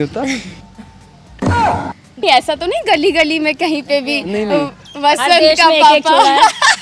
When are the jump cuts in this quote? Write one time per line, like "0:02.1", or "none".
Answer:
0:02.2